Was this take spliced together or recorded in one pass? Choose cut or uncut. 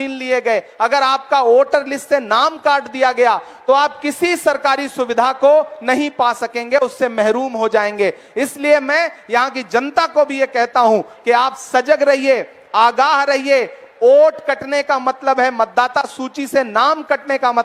uncut